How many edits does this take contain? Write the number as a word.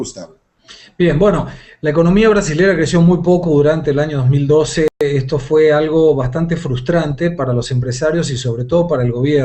one